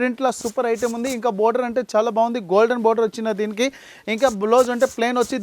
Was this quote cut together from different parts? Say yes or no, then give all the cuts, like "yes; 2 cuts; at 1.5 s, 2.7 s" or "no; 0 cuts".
no; 0 cuts